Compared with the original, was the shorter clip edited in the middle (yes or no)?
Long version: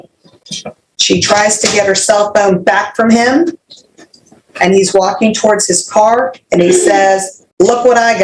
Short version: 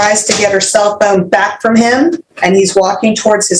yes